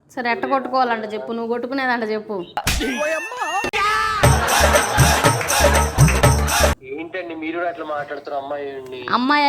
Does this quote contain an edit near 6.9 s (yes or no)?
no